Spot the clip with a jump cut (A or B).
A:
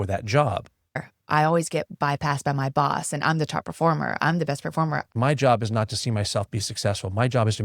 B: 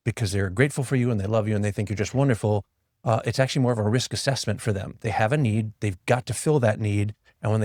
A